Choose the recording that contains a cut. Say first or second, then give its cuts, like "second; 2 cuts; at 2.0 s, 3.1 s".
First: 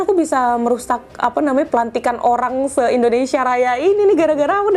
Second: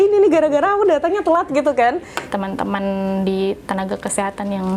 second; 1 cut; at 2.1 s